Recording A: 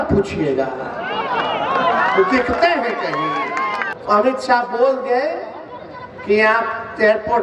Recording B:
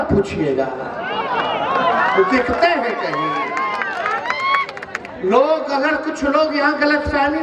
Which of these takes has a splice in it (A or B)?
A